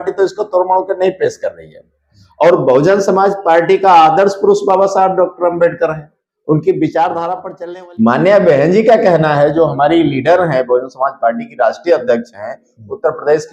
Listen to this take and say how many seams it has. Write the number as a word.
one